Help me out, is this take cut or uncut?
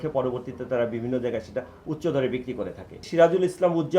cut